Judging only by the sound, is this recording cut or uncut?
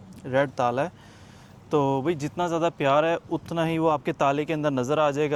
uncut